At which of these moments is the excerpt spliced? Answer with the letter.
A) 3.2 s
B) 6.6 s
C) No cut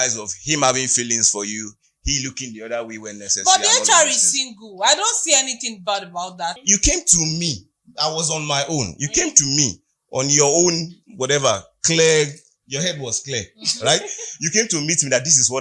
B